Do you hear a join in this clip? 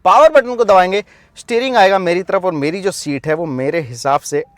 no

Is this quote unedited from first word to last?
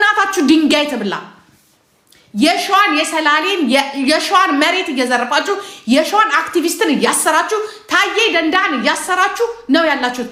yes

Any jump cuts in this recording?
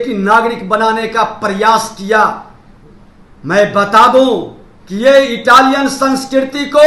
no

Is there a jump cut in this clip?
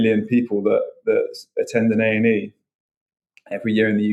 no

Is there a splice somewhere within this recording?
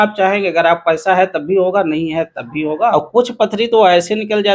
yes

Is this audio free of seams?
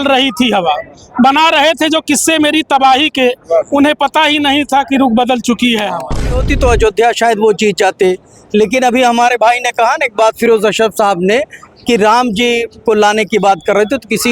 no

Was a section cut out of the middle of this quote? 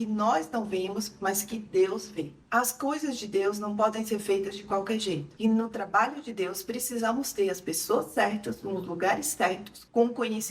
yes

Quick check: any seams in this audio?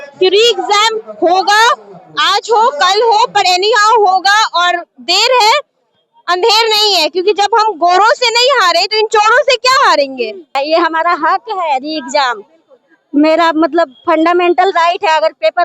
yes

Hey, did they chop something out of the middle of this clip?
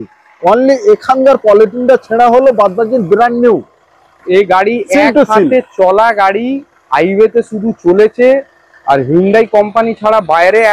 no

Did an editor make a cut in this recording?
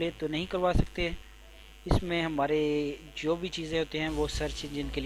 no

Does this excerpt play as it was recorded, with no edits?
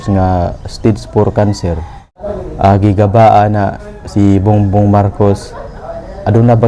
no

